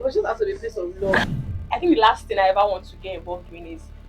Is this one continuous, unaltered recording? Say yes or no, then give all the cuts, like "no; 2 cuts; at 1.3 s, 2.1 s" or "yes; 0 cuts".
no; 1 cut; at 1.2 s